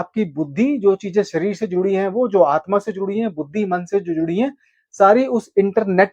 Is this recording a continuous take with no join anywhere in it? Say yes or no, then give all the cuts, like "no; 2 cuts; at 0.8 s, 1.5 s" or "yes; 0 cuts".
yes; 0 cuts